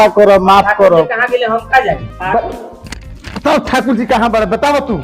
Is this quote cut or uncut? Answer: cut